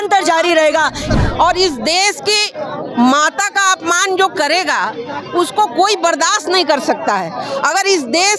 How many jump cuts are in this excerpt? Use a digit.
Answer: 1